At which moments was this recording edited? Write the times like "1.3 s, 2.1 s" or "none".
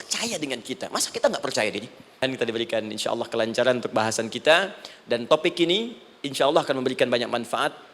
2.2 s